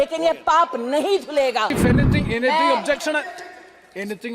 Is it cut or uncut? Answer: cut